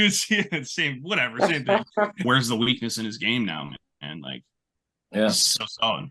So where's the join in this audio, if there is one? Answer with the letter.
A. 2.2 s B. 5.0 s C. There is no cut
A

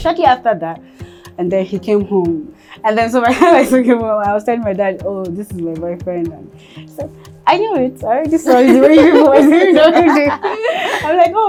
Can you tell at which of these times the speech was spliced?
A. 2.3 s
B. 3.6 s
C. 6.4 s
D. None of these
D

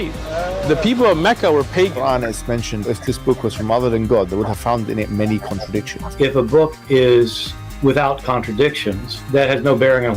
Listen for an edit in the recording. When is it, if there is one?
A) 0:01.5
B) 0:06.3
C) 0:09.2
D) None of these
B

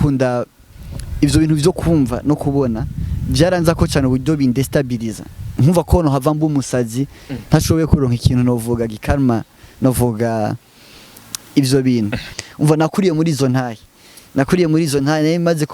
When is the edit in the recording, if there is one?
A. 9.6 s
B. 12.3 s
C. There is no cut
B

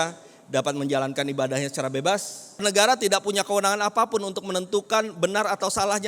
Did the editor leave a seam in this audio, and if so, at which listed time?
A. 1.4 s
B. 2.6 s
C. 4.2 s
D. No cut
B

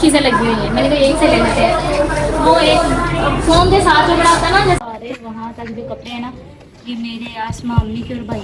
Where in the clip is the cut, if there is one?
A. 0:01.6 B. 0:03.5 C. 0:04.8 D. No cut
C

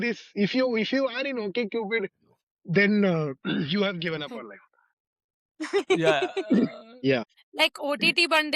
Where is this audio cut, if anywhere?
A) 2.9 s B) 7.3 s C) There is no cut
B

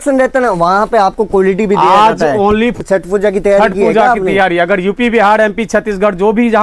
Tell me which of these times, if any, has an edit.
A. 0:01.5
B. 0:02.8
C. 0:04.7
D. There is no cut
B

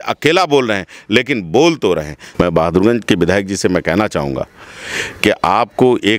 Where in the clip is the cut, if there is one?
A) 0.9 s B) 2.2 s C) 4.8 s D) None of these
B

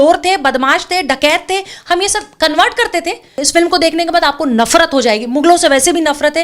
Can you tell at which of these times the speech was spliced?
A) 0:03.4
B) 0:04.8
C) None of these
A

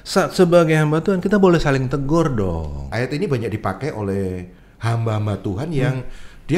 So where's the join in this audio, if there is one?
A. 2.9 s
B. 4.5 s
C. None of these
A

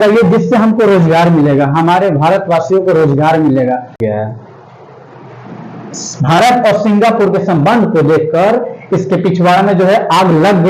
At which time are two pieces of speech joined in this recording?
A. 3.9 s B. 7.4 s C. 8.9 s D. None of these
A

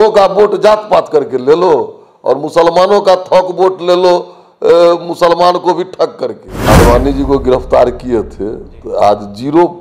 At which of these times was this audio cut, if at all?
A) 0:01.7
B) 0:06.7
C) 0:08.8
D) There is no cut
B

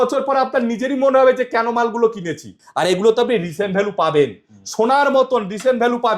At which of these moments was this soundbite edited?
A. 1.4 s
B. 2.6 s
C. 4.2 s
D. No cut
B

